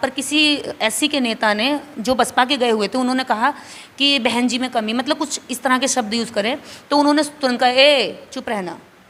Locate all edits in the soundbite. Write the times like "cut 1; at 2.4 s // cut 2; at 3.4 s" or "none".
none